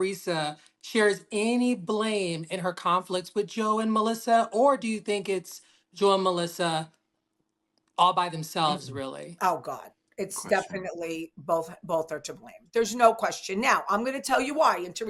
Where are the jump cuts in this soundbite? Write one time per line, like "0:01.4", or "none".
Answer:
none